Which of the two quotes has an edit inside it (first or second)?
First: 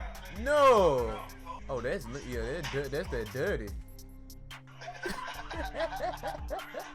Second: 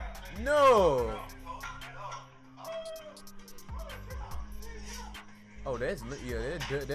first